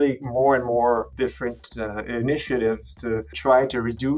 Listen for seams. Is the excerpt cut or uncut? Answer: cut